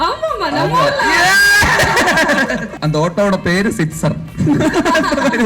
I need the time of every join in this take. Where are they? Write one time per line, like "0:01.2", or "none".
0:02.7